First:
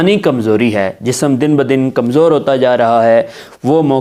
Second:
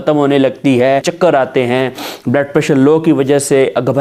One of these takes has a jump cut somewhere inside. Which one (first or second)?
second